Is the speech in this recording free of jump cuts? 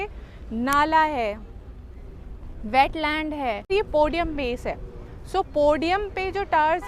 no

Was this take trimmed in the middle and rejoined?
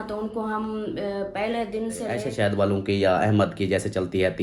yes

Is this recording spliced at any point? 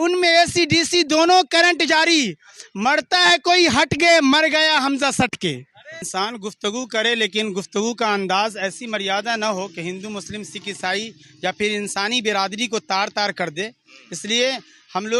yes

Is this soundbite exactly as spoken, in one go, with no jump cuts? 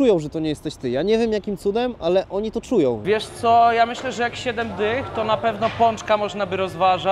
no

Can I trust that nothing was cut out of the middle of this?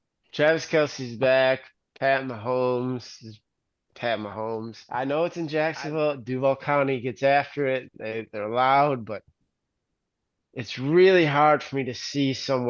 no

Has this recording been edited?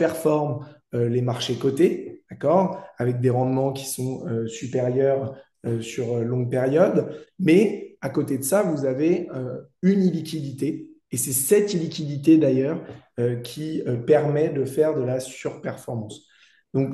no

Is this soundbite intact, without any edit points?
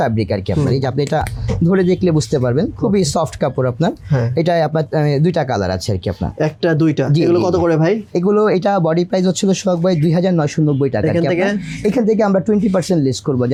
yes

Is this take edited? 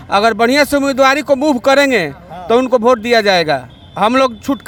no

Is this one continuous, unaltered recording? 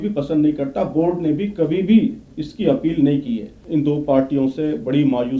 no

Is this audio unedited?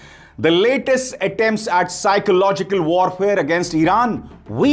yes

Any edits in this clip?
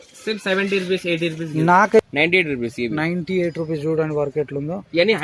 yes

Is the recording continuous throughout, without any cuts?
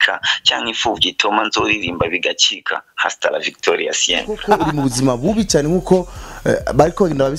no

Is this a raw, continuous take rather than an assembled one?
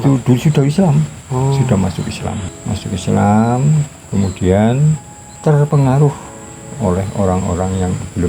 yes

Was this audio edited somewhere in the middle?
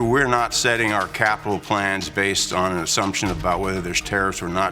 no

